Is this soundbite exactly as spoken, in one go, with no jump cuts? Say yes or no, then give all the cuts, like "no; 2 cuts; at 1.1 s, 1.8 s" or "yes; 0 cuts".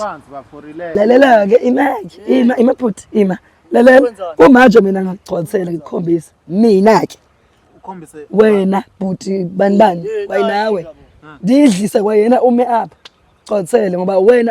no; 1 cut; at 1.0 s